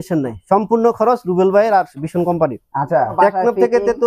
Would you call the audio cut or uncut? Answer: cut